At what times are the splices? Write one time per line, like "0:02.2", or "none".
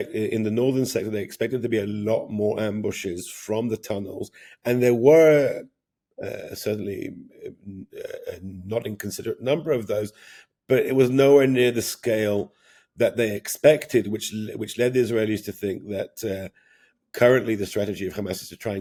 none